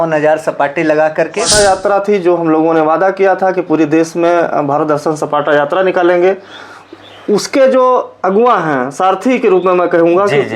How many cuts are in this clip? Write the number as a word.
one